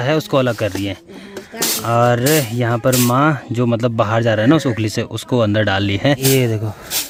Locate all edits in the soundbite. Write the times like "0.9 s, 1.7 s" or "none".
none